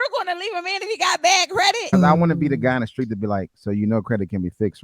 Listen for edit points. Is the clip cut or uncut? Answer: cut